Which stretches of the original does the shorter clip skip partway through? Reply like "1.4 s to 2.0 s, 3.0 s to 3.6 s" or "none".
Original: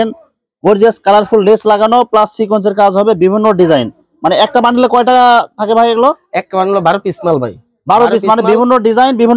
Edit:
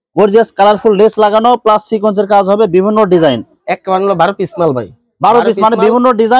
4.1 s to 6.3 s